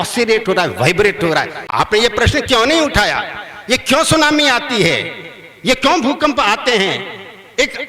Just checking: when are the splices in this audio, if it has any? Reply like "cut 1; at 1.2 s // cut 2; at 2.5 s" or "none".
cut 1; at 1.6 s